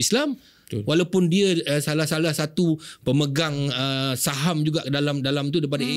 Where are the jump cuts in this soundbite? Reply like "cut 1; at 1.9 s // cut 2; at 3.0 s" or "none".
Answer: none